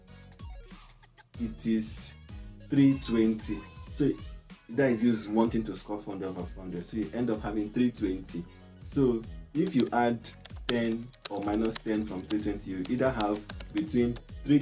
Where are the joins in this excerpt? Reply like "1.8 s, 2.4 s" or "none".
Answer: 1.4 s